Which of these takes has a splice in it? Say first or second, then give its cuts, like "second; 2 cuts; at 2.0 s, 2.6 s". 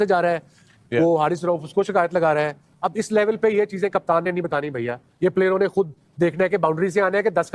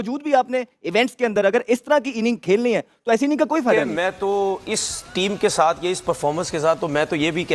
second; 1 cut; at 3.9 s